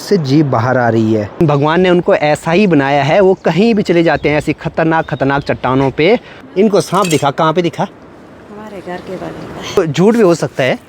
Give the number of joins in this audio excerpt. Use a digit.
3